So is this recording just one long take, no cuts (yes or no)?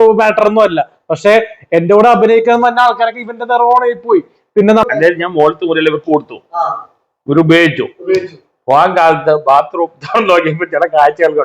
no